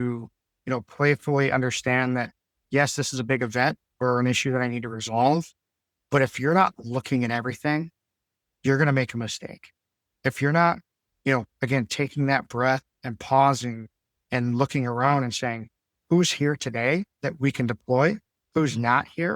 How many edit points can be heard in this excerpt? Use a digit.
1